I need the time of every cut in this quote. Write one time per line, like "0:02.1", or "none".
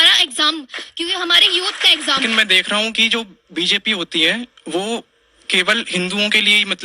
0:02.2